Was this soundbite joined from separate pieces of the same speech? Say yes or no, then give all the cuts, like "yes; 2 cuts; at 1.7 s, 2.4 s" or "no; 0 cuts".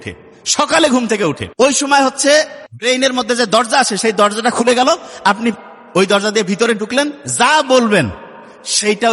yes; 2 cuts; at 1.4 s, 2.6 s